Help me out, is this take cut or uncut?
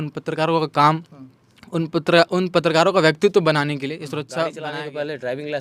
cut